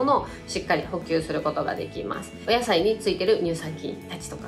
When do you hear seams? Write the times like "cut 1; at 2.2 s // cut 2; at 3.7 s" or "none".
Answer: cut 1; at 2.3 s